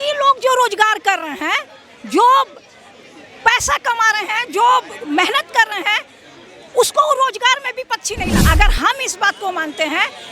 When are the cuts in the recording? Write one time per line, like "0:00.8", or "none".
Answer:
0:08.4